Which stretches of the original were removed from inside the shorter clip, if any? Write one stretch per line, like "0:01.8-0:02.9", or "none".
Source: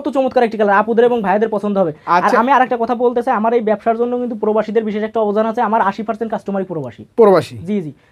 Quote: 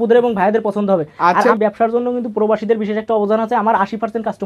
0:02.4-0:03.6